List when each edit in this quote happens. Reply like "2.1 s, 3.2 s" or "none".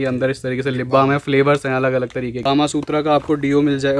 2.3 s